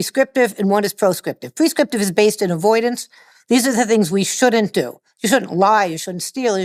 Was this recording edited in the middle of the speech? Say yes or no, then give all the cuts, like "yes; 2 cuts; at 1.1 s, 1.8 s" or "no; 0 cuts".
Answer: no; 0 cuts